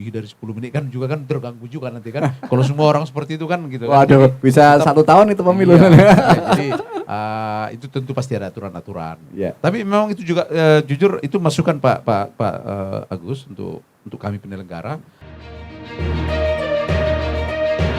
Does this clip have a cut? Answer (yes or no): yes